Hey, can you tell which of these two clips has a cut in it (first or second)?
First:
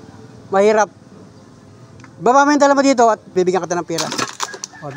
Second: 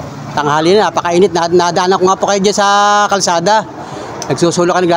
first